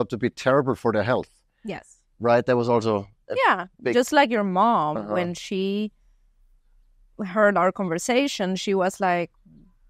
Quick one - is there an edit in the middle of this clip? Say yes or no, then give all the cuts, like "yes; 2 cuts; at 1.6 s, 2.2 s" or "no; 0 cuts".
no; 0 cuts